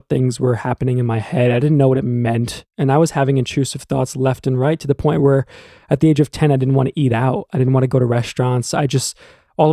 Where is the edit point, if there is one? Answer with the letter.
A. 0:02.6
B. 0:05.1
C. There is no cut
A